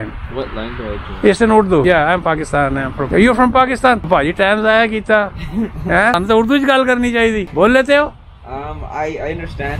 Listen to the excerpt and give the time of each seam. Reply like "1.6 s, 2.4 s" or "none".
1.8 s, 3.0 s, 4.1 s, 6.2 s, 7.5 s